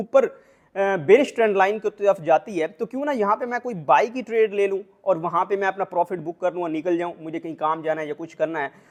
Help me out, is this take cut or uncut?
uncut